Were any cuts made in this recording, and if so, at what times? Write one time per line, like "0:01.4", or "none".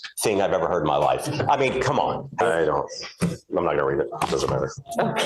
0:02.4